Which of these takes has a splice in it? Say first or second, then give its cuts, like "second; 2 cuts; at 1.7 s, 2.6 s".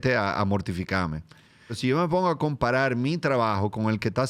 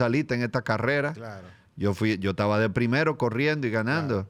first; 1 cut; at 1.8 s